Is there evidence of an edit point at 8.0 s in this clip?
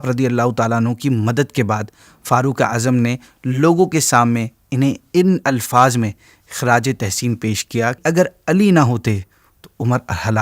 yes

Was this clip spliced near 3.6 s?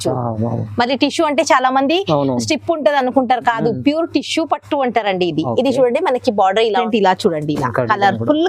no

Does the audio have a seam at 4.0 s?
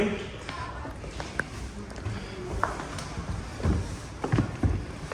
no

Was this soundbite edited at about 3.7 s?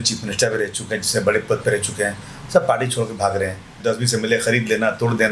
yes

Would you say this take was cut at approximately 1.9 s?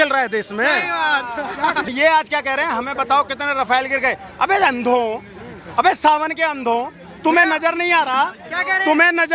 yes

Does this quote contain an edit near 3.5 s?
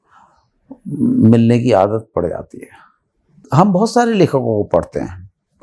yes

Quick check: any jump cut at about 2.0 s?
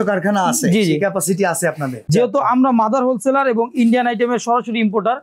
yes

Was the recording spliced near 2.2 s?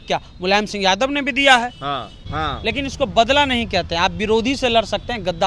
yes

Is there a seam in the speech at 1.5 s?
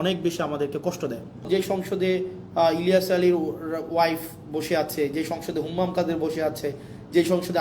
yes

